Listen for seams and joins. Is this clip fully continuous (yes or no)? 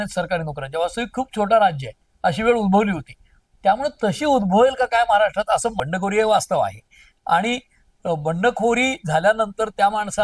no